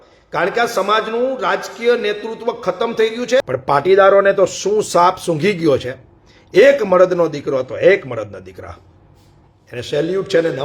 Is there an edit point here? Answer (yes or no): yes